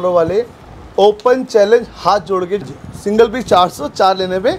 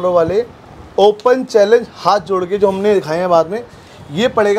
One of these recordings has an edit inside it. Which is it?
first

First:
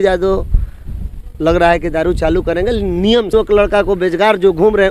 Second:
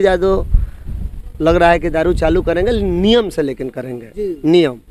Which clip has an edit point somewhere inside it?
first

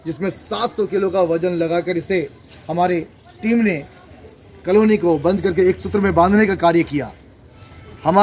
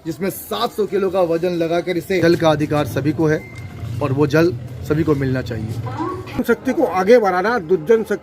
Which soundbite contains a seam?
second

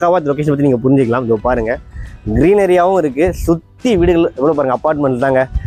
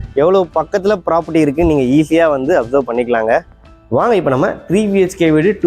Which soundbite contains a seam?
second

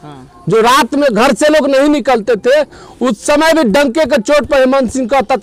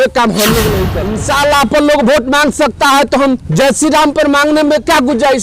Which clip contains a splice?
second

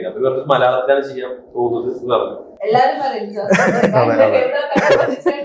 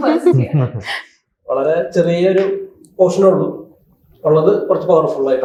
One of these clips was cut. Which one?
first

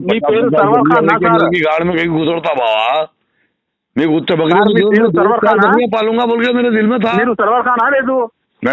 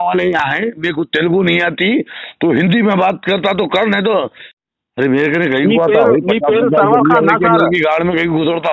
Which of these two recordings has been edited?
second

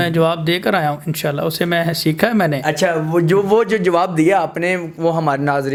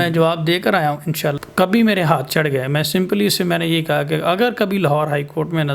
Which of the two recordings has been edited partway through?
second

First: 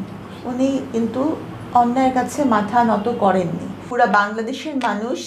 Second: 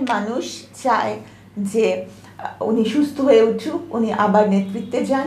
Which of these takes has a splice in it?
first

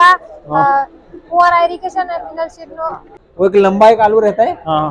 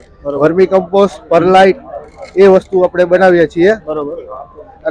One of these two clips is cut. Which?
first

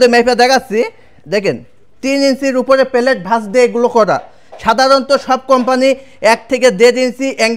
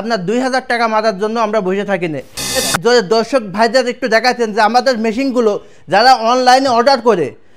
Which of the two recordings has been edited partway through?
second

